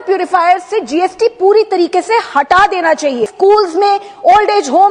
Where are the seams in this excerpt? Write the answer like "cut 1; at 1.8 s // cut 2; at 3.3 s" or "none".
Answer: cut 1; at 3.3 s